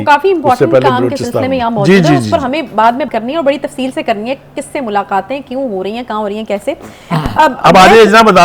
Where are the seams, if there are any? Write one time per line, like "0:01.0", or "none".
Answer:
0:03.1